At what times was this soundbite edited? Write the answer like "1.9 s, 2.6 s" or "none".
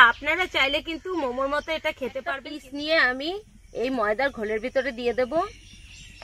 2.4 s